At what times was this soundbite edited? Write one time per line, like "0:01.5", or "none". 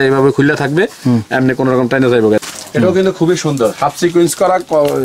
0:02.4